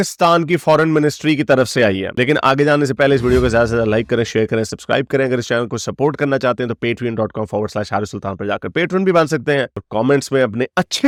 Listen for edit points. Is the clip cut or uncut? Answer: uncut